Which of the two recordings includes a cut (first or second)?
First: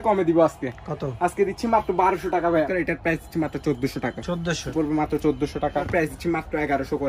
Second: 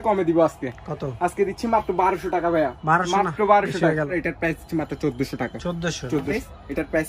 first